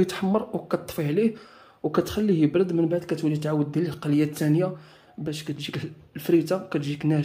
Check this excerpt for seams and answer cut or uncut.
uncut